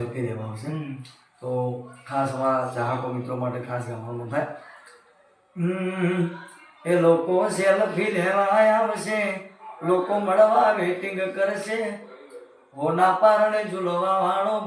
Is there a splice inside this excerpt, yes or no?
no